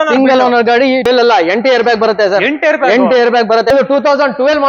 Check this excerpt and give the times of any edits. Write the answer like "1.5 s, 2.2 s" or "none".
1.1 s, 3.7 s